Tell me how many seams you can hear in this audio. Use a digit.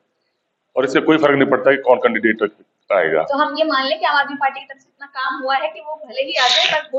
0